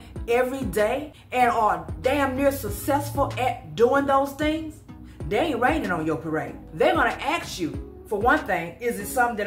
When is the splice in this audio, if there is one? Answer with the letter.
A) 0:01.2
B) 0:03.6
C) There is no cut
A